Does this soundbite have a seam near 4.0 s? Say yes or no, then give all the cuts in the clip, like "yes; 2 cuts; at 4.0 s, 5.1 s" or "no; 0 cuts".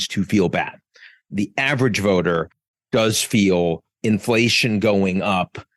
yes; 1 cut; at 4.0 s